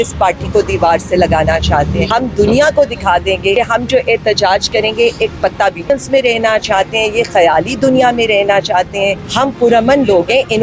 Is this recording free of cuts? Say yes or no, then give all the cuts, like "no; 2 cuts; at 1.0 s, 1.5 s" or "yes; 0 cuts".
no; 4 cuts; at 2.1 s, 3.5 s, 5.9 s, 9.2 s